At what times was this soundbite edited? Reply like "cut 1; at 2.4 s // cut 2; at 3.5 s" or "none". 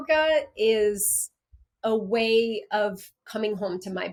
none